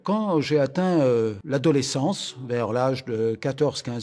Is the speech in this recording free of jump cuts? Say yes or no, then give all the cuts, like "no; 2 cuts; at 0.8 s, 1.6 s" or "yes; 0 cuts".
no; 1 cut; at 1.4 s